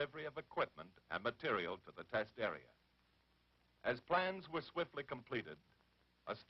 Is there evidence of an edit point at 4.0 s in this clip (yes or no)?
no